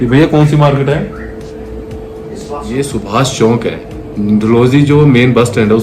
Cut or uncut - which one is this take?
cut